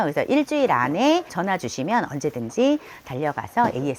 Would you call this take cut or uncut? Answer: cut